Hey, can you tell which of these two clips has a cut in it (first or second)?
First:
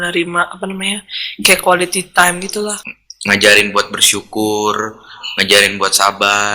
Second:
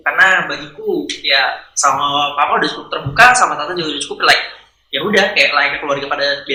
first